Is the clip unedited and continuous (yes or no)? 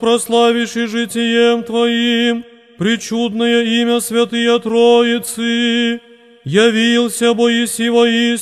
yes